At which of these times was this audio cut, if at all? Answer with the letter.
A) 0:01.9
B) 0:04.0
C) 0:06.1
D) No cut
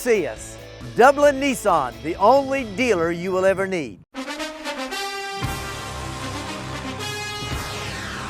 B